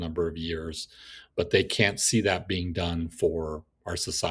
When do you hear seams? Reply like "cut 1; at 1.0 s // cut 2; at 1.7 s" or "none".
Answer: none